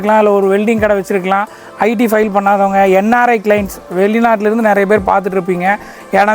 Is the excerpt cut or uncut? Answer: uncut